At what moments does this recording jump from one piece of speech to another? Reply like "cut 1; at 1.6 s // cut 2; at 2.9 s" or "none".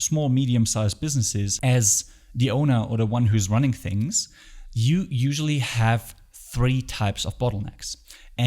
cut 1; at 1.5 s

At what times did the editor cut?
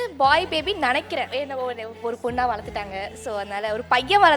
cut 1; at 1.3 s

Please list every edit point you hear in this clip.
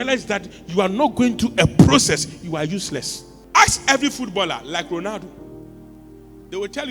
none

